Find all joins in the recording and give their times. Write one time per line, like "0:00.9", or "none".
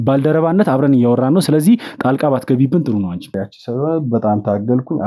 0:03.4